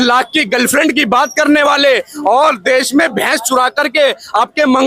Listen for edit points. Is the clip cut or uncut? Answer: uncut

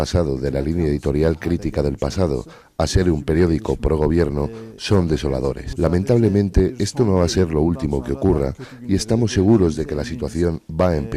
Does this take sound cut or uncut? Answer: cut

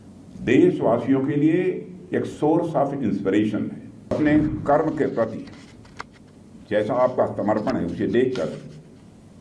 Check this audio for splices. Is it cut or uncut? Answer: cut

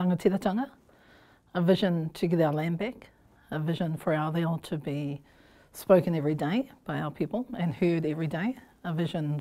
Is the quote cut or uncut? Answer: uncut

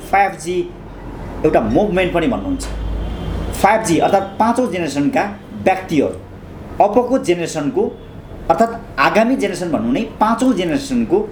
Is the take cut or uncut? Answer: uncut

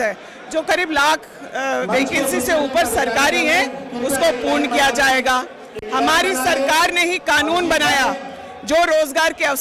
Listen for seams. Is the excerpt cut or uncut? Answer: uncut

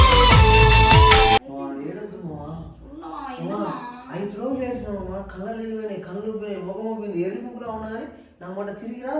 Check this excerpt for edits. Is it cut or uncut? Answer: cut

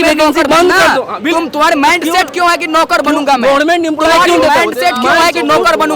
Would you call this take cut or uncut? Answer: uncut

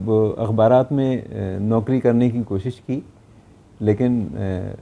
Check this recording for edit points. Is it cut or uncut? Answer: uncut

